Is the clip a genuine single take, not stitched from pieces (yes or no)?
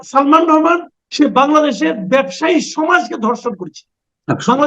no